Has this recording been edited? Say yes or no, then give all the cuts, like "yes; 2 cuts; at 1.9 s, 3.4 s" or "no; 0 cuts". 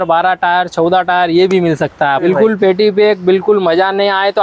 yes; 1 cut; at 2.2 s